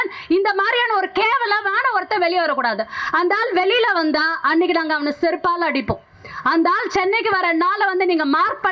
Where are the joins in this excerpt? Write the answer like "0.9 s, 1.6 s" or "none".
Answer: none